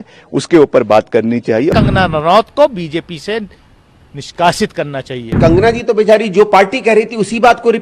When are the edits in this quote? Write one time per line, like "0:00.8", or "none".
0:01.7
0:05.4